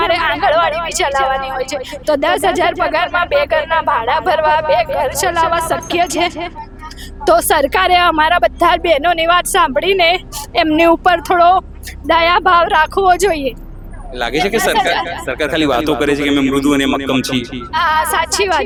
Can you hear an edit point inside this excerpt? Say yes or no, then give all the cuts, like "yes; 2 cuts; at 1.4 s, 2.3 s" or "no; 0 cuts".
no; 0 cuts